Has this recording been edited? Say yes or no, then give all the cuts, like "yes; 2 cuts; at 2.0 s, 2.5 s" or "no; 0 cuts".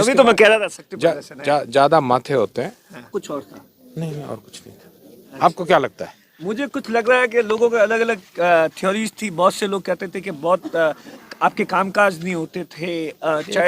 yes; 1 cut; at 3.1 s